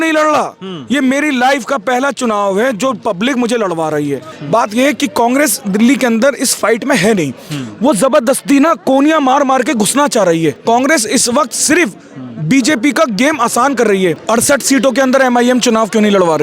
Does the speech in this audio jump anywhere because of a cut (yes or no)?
yes